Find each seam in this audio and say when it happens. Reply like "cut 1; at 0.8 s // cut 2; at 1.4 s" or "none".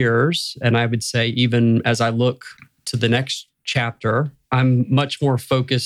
cut 1; at 4.4 s